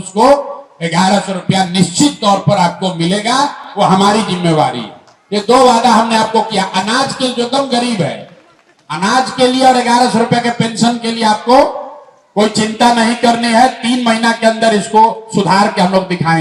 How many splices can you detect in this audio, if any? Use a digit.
0